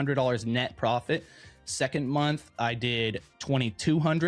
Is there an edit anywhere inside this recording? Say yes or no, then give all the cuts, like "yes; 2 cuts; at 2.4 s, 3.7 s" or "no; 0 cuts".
no; 0 cuts